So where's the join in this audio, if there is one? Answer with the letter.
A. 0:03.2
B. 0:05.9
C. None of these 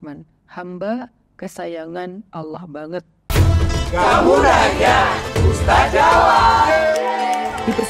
A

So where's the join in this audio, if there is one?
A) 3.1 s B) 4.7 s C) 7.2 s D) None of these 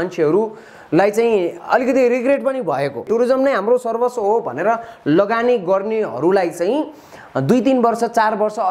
A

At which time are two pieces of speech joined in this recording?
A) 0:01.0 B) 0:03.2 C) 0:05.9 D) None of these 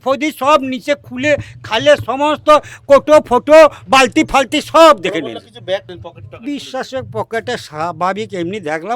C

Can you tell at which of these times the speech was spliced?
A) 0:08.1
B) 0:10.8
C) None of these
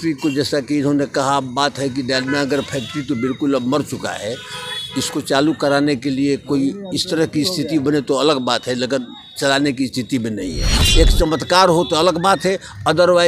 B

